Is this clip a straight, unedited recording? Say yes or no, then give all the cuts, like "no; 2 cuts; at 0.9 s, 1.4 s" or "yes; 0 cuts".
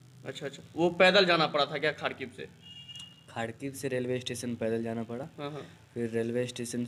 yes; 0 cuts